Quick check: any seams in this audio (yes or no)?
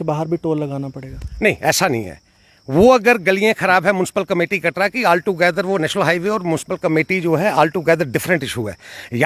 no